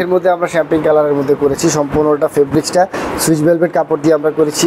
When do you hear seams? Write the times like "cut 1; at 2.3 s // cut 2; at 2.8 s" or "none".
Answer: none